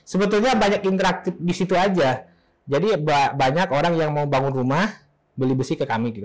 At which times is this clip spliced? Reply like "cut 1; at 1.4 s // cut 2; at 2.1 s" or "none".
none

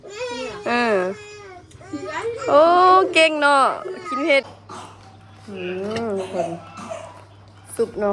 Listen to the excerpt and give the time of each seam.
cut 1; at 4.5 s

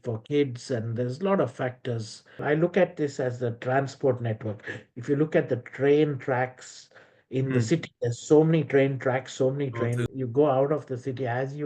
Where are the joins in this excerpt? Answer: cut 1; at 2.4 s // cut 2; at 10.1 s

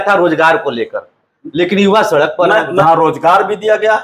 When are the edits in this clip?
cut 1; at 2.8 s

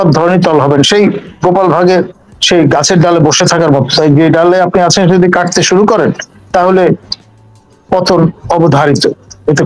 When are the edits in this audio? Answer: none

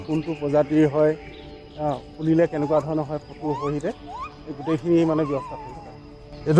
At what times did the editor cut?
none

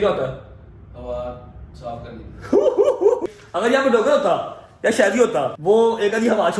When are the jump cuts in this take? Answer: cut 1; at 3.2 s // cut 2; at 5.5 s

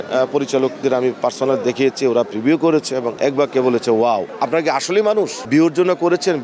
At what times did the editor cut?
cut 1; at 3.1 s // cut 2; at 4.3 s // cut 3; at 5.4 s

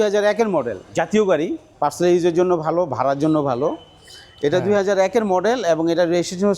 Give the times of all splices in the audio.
cut 1; at 1.6 s

